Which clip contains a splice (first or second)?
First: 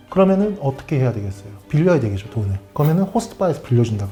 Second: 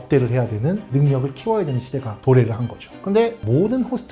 second